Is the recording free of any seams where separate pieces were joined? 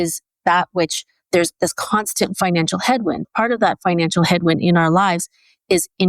no; 1 cut; at 3.3 s

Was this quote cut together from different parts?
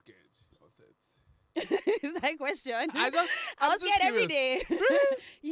no; 0 cuts

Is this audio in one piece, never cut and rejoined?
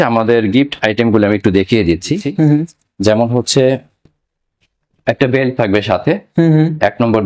no; 1 cut; at 2.3 s

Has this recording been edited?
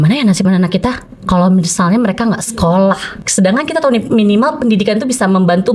yes; 1 cut; at 3.1 s

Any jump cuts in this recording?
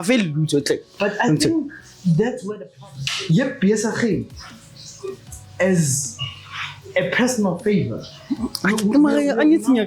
yes; 1 cut; at 2.7 s

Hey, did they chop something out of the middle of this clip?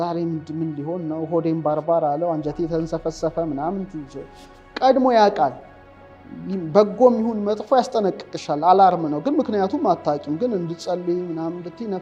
no; 0 cuts

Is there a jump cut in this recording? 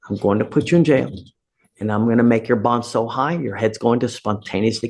no; 0 cuts

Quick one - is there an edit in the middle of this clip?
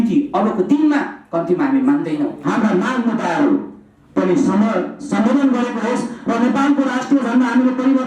yes; 1 cut; at 2.4 s

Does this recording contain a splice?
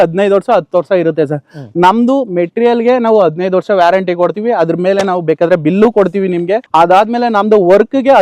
no; 0 cuts

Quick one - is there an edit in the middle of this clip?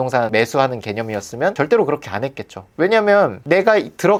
no; 0 cuts

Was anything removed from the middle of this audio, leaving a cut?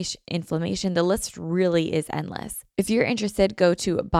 yes; 1 cut; at 2.6 s

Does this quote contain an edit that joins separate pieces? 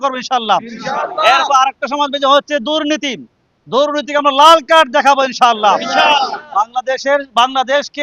no; 0 cuts

